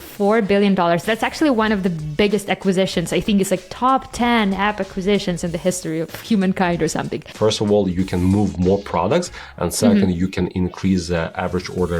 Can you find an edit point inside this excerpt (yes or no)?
yes